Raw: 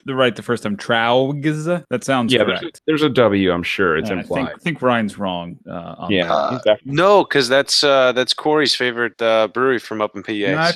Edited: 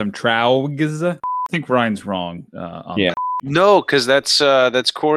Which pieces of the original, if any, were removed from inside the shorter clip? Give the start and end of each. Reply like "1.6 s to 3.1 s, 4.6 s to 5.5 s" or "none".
2.0 s to 4.5 s, 6.5 s to 6.8 s